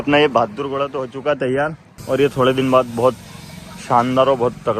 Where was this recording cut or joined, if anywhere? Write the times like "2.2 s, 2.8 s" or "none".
1.9 s